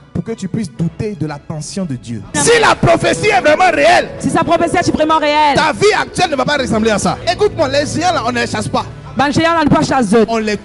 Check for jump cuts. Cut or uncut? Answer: cut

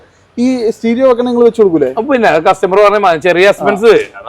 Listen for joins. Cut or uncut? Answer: uncut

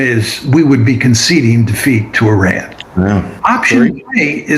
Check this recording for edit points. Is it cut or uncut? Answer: cut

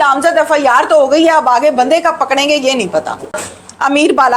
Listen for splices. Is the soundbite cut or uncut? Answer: cut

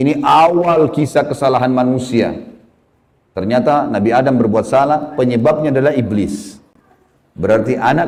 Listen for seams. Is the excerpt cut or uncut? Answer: uncut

